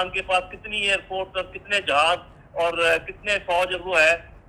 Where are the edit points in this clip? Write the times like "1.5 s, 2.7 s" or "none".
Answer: none